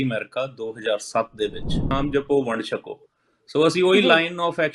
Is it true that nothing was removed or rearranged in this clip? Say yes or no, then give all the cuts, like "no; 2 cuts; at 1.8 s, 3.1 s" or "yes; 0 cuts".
no; 1 cut; at 1.9 s